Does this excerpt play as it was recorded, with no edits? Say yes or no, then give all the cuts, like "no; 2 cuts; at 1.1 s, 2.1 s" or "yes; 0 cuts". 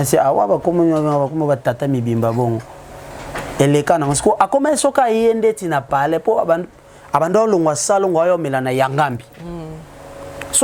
yes; 0 cuts